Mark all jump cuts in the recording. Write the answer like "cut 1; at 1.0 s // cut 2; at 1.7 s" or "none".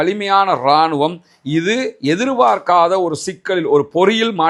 none